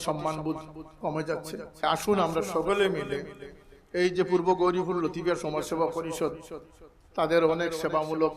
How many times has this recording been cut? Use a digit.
1